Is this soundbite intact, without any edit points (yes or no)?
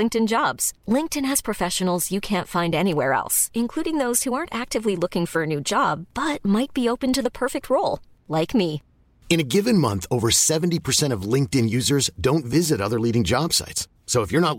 yes